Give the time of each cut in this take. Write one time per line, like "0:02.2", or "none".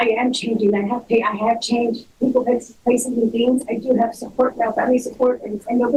none